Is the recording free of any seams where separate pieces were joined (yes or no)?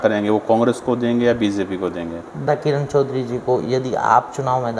no